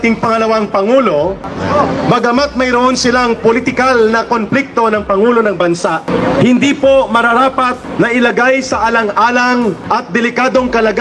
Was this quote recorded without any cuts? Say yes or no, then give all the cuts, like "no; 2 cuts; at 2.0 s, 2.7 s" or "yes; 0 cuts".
no; 4 cuts; at 1.5 s, 6.1 s, 7.8 s, 9.8 s